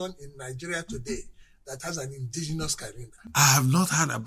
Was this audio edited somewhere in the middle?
no; 0 cuts

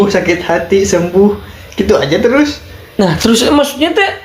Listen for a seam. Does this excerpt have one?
no; 0 cuts

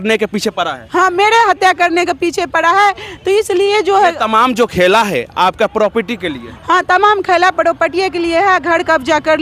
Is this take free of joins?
yes; 0 cuts

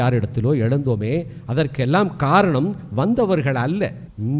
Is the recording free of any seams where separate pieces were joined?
yes; 0 cuts

